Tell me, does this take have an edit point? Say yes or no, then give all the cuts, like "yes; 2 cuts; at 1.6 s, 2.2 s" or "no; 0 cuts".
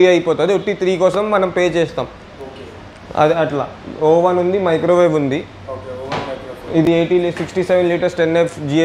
no; 0 cuts